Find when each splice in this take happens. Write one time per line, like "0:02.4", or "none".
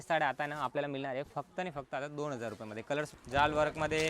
0:03.1